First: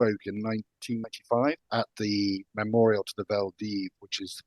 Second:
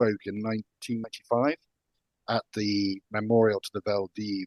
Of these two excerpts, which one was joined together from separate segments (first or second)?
first